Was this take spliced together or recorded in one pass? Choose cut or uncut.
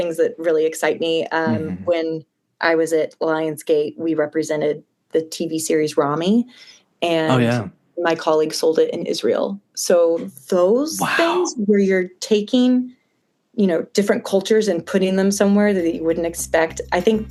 uncut